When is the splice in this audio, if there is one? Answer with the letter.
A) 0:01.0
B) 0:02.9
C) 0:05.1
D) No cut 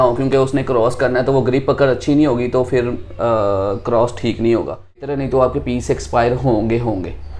C